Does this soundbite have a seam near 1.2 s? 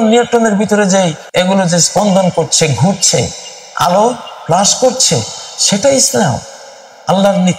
yes; 1 cut; at 1.2 s

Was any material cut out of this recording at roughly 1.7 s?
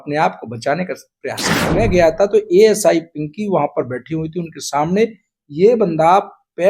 yes; 1 cut; at 1.7 s

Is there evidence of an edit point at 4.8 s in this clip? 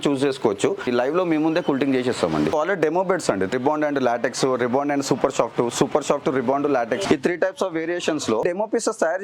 no; 5 cuts; at 0.9 s, 2.5 s, 3.5 s, 7.1 s, 8.4 s

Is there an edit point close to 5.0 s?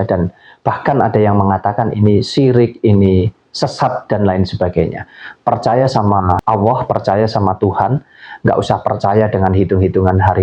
no; 1 cut; at 6.4 s

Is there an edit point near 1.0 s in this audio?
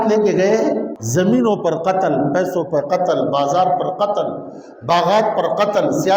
yes; 1 cut; at 1.0 s

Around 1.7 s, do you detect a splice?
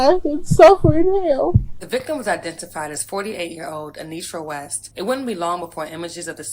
yes; 2 cuts; at 1.7 s, 4.8 s

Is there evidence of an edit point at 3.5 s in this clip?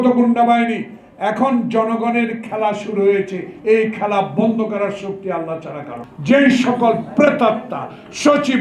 no; 1 cut; at 6.0 s

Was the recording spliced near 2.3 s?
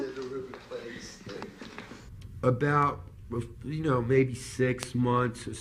yes; 1 cut; at 2.3 s

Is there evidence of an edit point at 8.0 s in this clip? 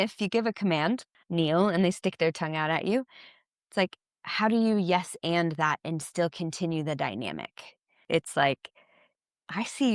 yes; 2 cuts; at 1.1 s, 8.0 s

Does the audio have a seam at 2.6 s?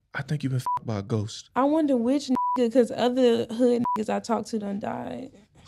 no; 0 cuts

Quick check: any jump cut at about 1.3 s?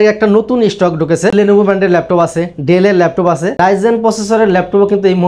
yes; 2 cuts; at 1.3 s, 3.5 s

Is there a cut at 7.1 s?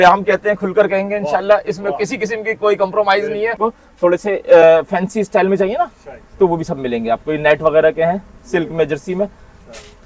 no; 1 cut; at 3.6 s

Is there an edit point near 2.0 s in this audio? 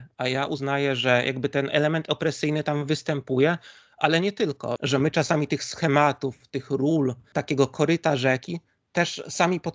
no; 2 cuts; at 4.8 s, 7.3 s

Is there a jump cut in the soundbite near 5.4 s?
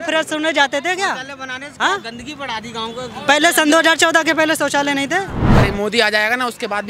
yes; 1 cut; at 5.4 s

